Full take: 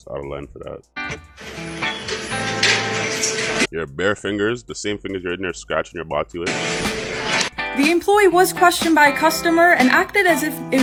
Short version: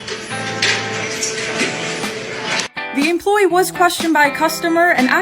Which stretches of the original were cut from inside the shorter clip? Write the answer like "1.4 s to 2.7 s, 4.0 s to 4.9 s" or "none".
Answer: 3.7 s to 6.5 s